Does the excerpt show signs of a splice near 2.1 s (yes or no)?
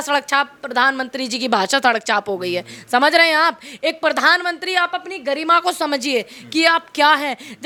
no